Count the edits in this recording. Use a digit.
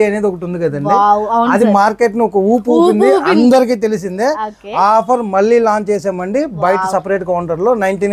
0